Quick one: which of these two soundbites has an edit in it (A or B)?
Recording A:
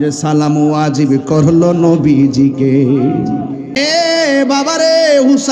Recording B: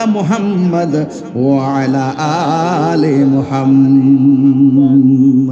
A